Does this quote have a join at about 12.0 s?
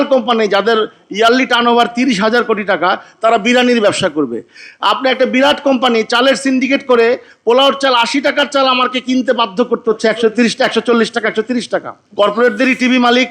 yes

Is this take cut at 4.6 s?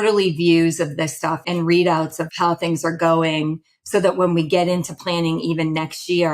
no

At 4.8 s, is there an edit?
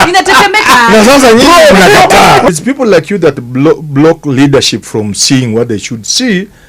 no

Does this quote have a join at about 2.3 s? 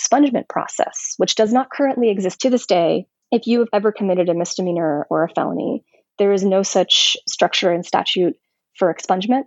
yes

